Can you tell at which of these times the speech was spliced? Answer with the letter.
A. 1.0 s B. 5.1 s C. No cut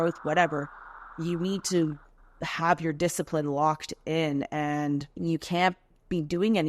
B